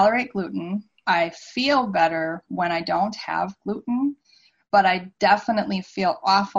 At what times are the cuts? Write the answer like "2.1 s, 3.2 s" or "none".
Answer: none